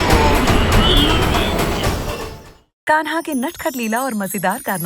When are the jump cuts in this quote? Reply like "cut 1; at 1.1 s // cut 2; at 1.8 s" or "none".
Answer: cut 1; at 2.1 s